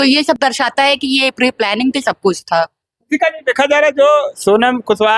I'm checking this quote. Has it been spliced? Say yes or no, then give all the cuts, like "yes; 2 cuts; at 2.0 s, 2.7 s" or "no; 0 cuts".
no; 0 cuts